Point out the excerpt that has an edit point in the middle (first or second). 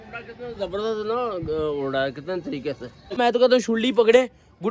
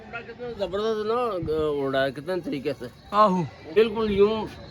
first